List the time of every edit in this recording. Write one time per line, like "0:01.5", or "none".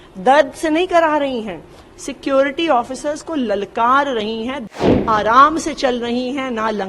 0:04.7